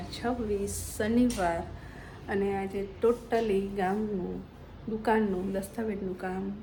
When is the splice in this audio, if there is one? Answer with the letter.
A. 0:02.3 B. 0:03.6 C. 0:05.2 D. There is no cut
D